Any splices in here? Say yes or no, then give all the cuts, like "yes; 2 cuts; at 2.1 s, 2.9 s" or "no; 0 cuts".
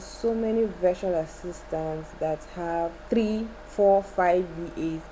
yes; 1 cut; at 3.0 s